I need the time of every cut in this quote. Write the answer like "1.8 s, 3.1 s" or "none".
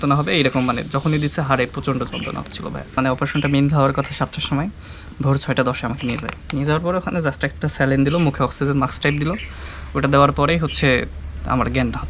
3.0 s